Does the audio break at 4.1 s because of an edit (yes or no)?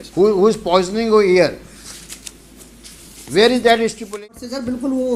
yes